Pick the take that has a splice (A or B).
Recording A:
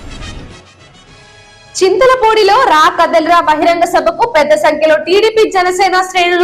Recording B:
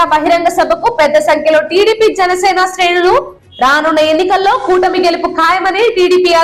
A